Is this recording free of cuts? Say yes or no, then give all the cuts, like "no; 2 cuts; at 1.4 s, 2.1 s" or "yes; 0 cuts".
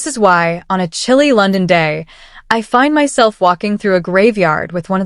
yes; 0 cuts